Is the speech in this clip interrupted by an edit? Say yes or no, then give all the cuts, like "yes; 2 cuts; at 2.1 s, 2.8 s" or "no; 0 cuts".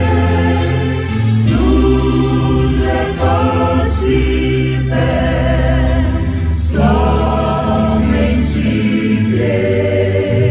no; 0 cuts